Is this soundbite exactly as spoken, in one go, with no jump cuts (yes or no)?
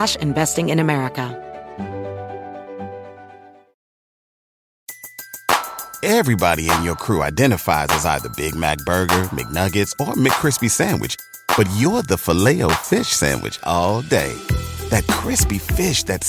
no